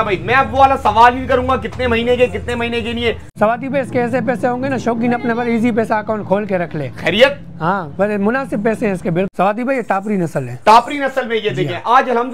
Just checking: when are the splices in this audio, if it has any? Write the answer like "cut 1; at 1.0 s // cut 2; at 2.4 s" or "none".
cut 1; at 3.3 s // cut 2; at 9.3 s